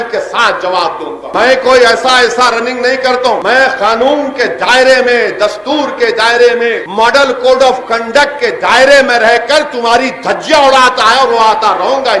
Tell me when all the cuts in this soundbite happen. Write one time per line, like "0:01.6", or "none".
none